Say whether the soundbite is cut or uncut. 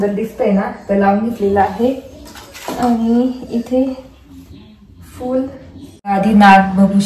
cut